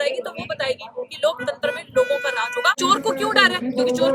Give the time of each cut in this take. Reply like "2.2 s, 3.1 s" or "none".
2.8 s